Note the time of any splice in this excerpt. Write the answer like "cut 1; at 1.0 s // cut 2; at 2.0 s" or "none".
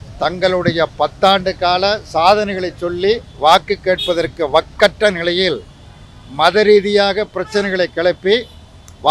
none